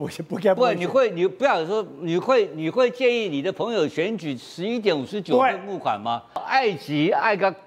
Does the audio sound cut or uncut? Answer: cut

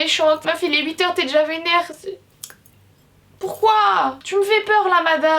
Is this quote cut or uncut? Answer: uncut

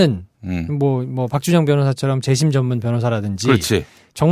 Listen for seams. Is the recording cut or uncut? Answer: cut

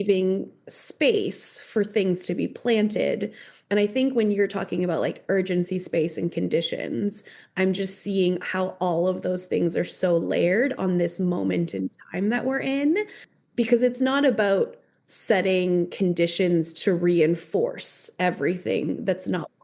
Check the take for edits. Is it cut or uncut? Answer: uncut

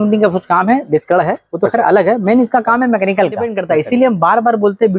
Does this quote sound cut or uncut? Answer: cut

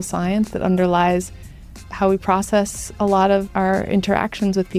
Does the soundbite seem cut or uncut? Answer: cut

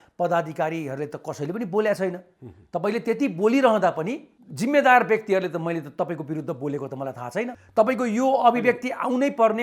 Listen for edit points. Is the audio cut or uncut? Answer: cut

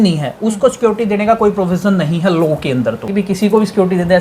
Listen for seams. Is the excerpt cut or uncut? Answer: cut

